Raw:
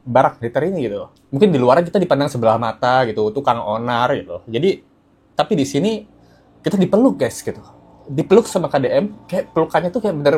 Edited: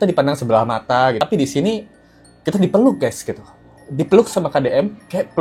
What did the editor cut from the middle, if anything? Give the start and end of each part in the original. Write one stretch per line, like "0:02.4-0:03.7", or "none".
0:03.1-0:05.4